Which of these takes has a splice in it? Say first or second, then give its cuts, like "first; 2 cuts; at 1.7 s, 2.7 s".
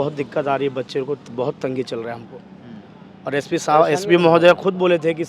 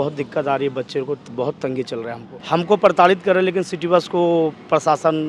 second; 1 cut; at 2.3 s